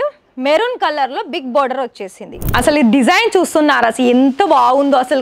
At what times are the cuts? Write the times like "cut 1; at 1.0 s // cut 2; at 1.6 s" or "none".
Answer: cut 1; at 2.3 s